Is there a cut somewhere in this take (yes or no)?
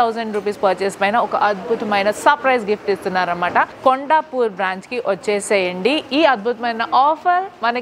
yes